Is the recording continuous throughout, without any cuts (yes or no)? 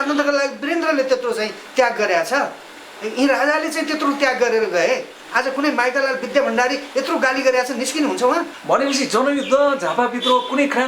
no